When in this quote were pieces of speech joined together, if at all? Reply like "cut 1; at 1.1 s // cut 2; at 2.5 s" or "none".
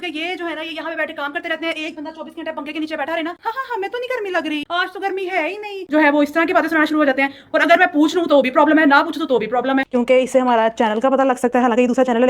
cut 1; at 3.4 s // cut 2; at 5.9 s // cut 3; at 9.9 s